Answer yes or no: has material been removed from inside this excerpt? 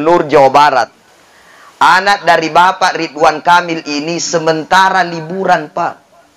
yes